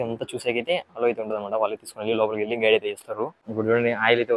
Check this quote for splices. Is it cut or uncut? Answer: cut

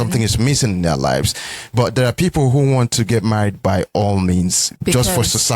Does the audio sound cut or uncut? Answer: cut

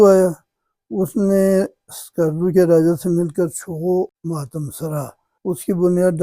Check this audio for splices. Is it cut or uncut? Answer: cut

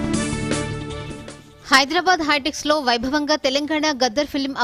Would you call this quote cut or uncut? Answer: cut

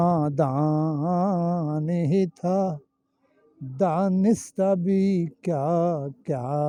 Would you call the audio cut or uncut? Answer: uncut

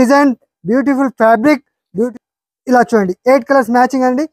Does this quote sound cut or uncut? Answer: cut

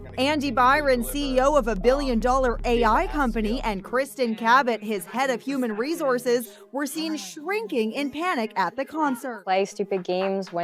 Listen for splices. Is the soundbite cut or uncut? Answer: uncut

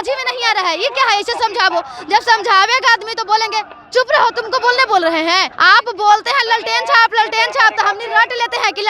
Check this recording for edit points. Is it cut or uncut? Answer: cut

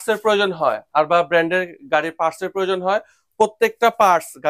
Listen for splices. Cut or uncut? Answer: uncut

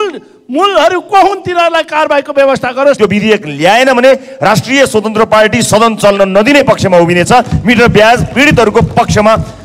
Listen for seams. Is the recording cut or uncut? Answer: cut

